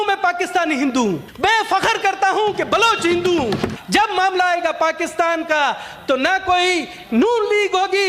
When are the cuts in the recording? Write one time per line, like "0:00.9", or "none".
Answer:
0:01.3
0:03.7